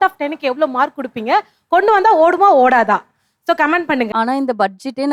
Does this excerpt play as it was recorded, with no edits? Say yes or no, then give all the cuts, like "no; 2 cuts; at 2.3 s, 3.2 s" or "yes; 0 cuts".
no; 1 cut; at 4.1 s